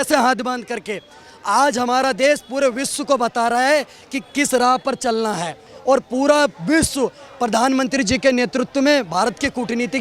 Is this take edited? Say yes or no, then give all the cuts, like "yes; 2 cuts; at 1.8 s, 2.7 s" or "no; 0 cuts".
no; 0 cuts